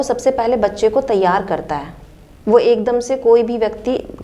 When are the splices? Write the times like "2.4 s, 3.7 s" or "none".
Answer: none